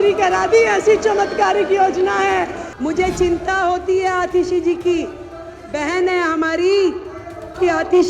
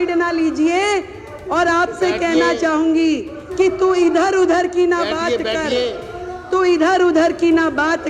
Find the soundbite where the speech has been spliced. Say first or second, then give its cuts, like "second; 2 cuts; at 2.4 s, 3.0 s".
first; 1 cut; at 2.6 s